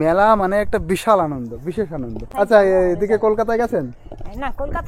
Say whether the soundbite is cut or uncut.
cut